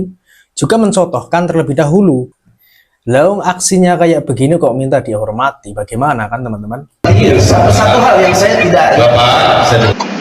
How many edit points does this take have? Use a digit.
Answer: 2